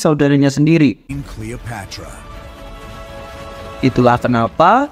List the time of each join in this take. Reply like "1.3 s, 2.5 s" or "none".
1.0 s